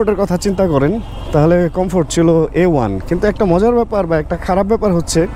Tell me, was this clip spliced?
no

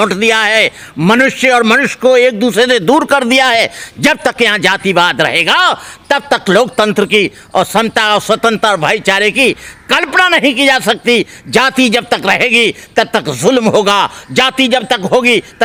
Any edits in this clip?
no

